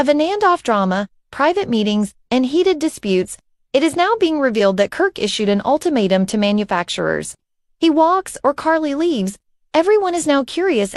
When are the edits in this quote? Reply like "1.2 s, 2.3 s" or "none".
none

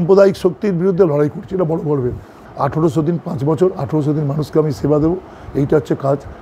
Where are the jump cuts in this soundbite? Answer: 2.4 s

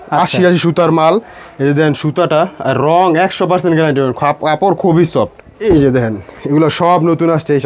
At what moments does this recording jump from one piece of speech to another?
5.4 s

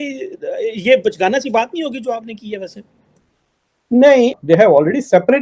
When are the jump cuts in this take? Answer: 4.3 s

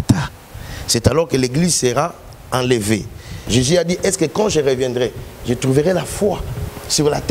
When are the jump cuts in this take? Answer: 3.3 s

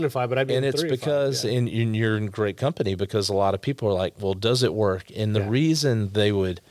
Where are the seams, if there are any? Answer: none

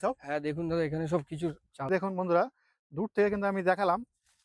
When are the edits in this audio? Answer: 1.9 s

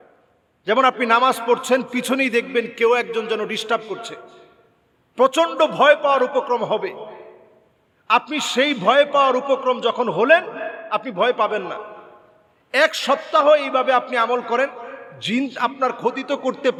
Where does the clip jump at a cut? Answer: none

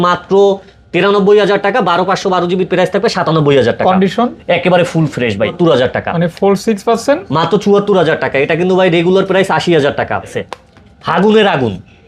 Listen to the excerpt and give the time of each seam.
5.5 s, 10.3 s

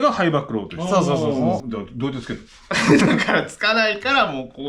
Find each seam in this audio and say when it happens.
1.6 s

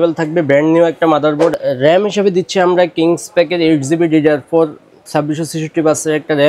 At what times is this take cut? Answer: 1.5 s

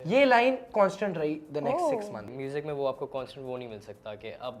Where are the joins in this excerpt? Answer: 2.3 s

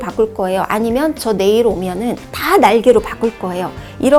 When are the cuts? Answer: none

